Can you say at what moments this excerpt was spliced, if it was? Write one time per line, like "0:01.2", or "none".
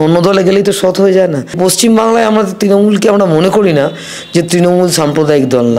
0:01.6